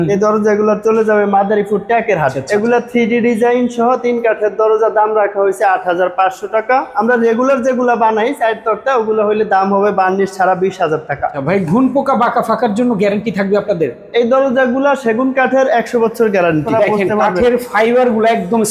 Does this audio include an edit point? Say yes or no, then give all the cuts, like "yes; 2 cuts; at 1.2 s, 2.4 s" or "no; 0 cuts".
yes; 4 cuts; at 2.4 s, 6.9 s, 11.4 s, 16.7 s